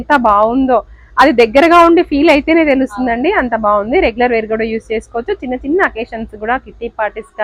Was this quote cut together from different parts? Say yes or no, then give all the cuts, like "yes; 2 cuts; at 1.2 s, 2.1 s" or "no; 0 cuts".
no; 0 cuts